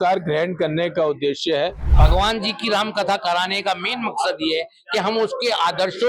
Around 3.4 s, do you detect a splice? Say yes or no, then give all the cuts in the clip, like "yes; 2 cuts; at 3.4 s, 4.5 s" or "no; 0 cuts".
no; 1 cut; at 1.8 s